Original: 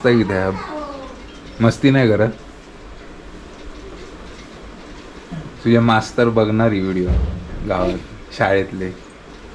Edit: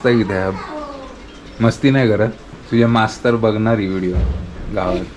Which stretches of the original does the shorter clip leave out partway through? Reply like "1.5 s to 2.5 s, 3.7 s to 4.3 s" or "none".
2.5 s to 5.4 s